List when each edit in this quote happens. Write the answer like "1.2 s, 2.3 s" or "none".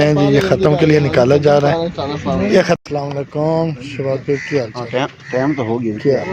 2.8 s